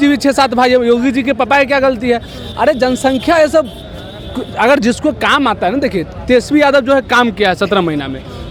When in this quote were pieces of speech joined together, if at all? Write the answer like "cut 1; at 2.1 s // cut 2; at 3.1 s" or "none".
none